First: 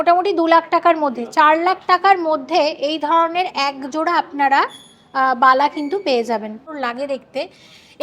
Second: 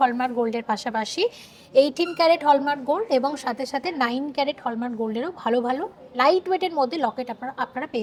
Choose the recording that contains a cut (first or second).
first